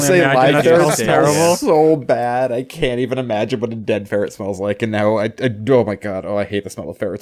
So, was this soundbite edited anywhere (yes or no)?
no